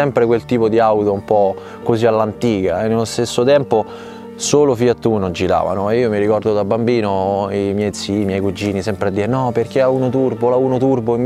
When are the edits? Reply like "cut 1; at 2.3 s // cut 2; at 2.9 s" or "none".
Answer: none